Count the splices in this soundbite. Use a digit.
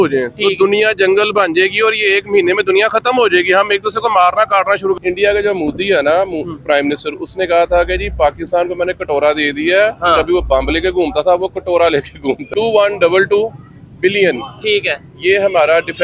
2